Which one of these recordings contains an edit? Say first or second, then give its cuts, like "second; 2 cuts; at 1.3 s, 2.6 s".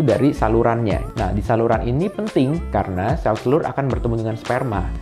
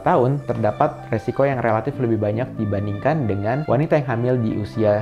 first; 1 cut; at 1.0 s